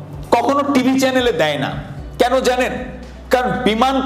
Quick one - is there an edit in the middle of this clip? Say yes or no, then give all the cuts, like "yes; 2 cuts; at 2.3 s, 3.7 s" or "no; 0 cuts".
no; 0 cuts